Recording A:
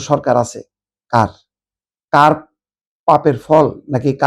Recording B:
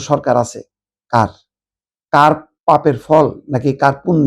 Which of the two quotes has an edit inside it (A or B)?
B